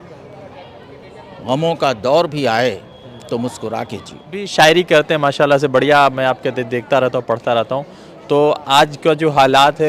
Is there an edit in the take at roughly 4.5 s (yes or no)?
yes